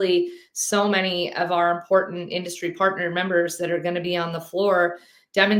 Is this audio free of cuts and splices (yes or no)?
yes